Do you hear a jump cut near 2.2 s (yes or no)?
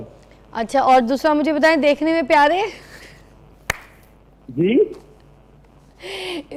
no